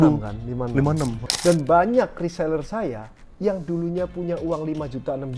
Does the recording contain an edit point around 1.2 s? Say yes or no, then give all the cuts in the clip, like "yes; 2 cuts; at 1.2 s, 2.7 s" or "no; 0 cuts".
yes; 1 cut; at 1.2 s